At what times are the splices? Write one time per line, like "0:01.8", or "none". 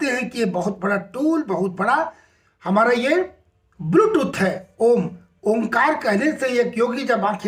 none